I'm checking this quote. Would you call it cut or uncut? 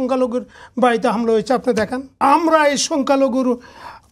cut